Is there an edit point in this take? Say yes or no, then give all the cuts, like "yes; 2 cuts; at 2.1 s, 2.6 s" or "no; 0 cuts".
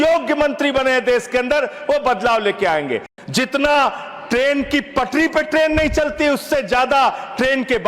yes; 1 cut; at 3.1 s